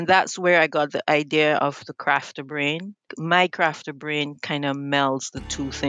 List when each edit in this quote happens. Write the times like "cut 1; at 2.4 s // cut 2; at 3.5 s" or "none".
cut 1; at 3.1 s